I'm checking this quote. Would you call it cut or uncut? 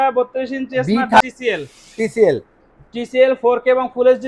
cut